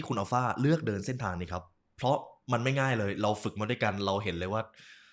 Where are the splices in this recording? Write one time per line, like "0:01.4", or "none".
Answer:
none